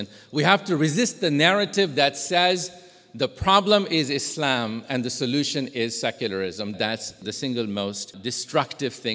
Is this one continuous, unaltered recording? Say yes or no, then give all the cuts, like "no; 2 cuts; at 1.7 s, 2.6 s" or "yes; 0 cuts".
no; 2 cuts; at 6.7 s, 8.1 s